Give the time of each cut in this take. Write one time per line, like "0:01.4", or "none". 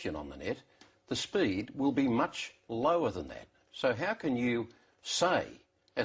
none